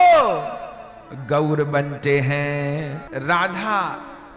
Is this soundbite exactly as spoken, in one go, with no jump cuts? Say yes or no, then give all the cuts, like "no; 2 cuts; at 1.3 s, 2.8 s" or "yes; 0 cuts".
no; 1 cut; at 3.0 s